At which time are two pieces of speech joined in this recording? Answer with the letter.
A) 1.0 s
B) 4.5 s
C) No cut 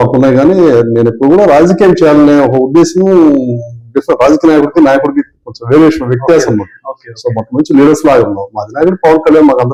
C